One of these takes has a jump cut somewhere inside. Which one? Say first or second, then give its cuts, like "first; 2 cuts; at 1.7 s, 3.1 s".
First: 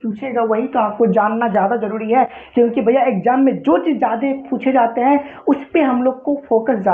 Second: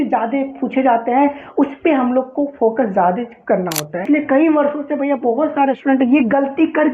second; 1 cut; at 4.0 s